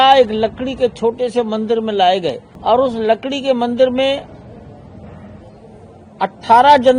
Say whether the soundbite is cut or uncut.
cut